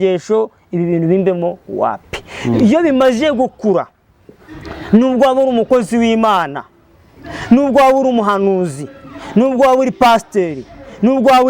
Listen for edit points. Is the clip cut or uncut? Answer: uncut